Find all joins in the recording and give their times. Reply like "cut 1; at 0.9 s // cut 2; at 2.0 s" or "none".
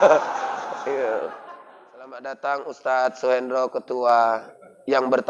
cut 1; at 2.2 s